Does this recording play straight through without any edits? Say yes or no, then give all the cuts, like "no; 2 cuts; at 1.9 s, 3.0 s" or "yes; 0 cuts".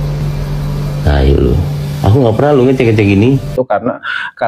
no; 1 cut; at 3.5 s